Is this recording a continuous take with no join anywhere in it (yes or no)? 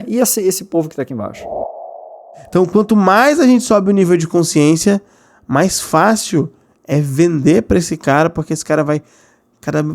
no